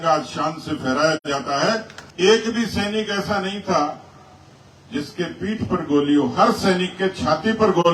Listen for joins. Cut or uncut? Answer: cut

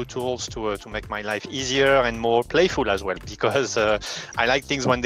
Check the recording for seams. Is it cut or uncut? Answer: cut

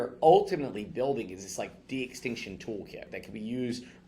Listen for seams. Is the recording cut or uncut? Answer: cut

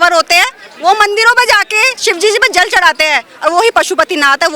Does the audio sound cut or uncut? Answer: uncut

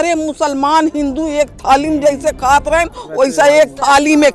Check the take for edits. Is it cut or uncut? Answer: uncut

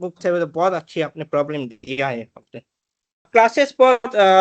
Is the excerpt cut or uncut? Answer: cut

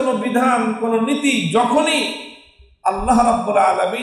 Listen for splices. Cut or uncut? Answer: uncut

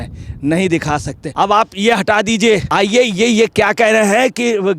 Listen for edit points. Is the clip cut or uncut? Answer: cut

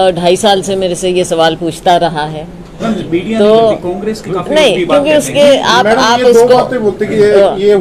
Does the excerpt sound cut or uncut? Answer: uncut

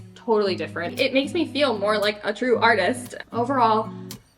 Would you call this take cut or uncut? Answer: cut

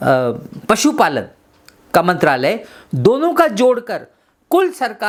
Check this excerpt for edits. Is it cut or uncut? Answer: uncut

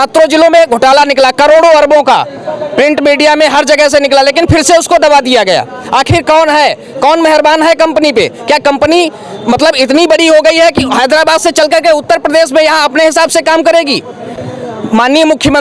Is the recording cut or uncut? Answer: uncut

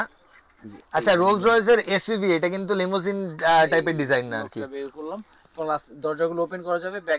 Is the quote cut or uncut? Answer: uncut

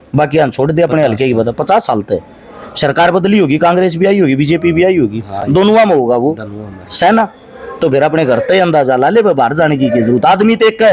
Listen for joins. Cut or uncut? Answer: uncut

